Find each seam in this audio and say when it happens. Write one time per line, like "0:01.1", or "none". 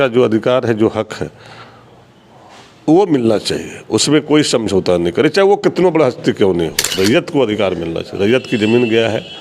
0:06.9